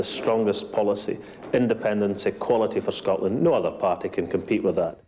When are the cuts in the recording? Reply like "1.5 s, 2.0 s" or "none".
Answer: none